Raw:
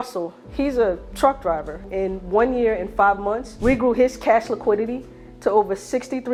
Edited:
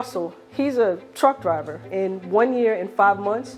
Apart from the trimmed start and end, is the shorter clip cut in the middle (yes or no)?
no